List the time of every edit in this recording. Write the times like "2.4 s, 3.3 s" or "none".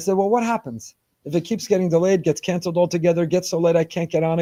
none